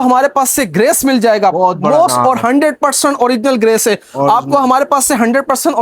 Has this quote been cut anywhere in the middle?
no; 0 cuts

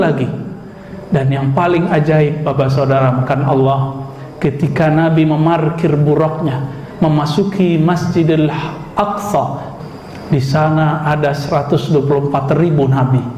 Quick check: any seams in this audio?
yes; 1 cut; at 9.6 s

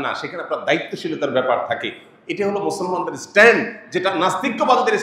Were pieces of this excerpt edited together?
no; 0 cuts

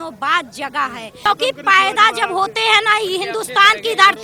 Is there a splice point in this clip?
yes; 1 cut; at 1.2 s

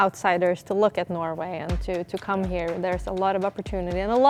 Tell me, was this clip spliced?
no; 0 cuts

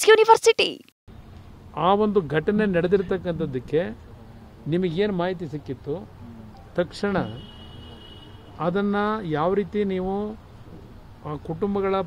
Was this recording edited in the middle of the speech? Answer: yes; 1 cut; at 1.0 s

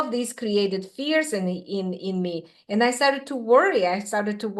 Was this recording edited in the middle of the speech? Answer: no; 0 cuts

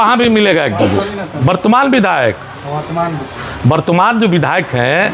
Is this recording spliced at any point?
yes; 1 cut; at 1.3 s

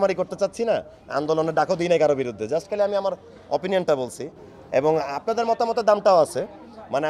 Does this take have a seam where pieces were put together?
no; 0 cuts

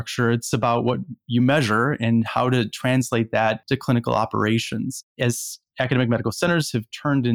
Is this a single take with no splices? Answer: yes; 0 cuts

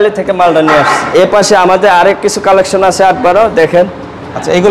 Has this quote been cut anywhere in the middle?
yes; 1 cut; at 1.0 s

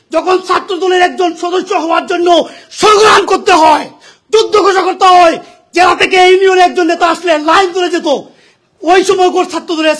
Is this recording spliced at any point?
no; 0 cuts

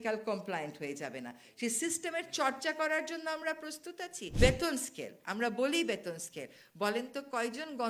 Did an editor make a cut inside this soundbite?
yes; 1 cut; at 4.2 s

